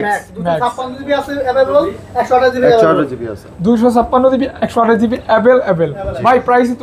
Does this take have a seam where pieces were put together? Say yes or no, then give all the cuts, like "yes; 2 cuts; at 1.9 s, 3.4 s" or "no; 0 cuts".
no; 0 cuts